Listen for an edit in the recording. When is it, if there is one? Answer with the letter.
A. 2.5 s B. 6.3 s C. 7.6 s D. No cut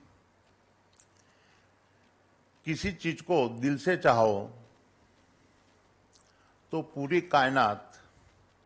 D